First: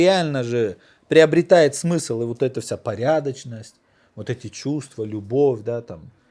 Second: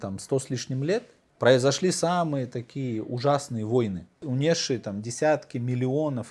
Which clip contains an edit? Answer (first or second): second